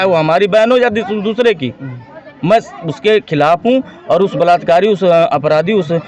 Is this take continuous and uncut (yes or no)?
yes